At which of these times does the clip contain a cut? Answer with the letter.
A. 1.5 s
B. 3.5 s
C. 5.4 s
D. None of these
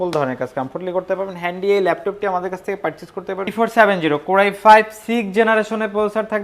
B